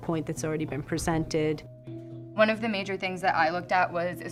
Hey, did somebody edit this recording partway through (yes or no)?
no